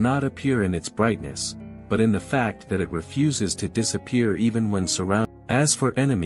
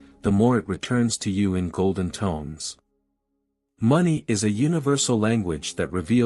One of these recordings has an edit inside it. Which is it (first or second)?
first